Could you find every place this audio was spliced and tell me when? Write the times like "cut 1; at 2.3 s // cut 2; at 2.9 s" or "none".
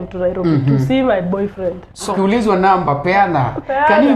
cut 1; at 2.1 s

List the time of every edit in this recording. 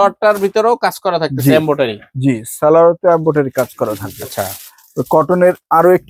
none

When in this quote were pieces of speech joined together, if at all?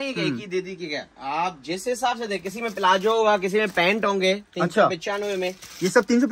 none

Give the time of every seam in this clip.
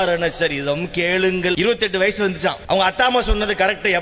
cut 1; at 1.6 s // cut 2; at 2.6 s

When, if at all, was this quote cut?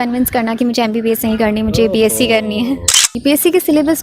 cut 1; at 3.0 s

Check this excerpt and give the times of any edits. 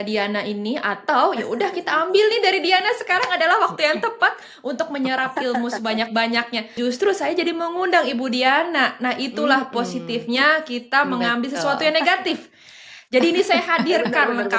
cut 1; at 6.8 s

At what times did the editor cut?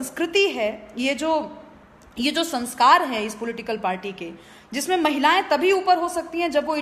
none

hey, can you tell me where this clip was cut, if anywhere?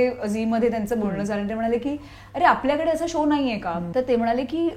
cut 1; at 3.8 s

